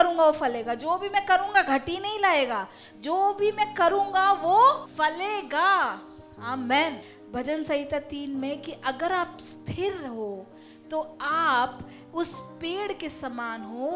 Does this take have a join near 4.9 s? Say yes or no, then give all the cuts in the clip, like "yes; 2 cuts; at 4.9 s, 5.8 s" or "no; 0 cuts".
yes; 2 cuts; at 4.9 s, 7.1 s